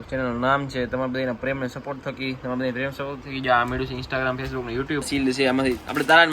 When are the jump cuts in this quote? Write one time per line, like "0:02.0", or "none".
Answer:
0:05.1